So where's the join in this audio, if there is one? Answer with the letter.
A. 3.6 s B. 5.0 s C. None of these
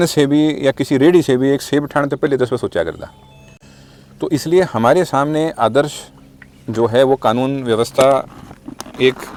C